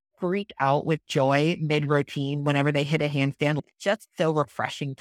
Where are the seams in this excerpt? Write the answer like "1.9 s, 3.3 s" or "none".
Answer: 3.6 s